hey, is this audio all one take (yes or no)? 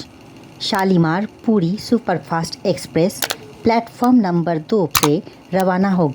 no